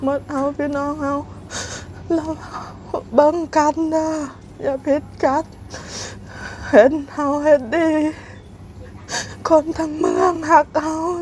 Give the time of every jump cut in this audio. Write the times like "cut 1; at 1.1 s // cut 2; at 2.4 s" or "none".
none